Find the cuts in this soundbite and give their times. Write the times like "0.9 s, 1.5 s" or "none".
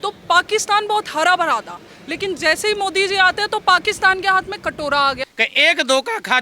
5.2 s